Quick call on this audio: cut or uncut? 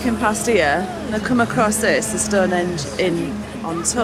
uncut